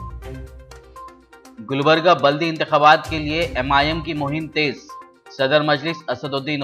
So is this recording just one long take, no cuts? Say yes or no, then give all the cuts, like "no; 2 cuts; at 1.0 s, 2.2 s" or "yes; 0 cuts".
no; 1 cut; at 0.9 s